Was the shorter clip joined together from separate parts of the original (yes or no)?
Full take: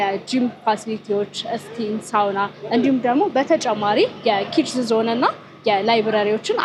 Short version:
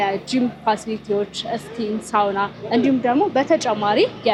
no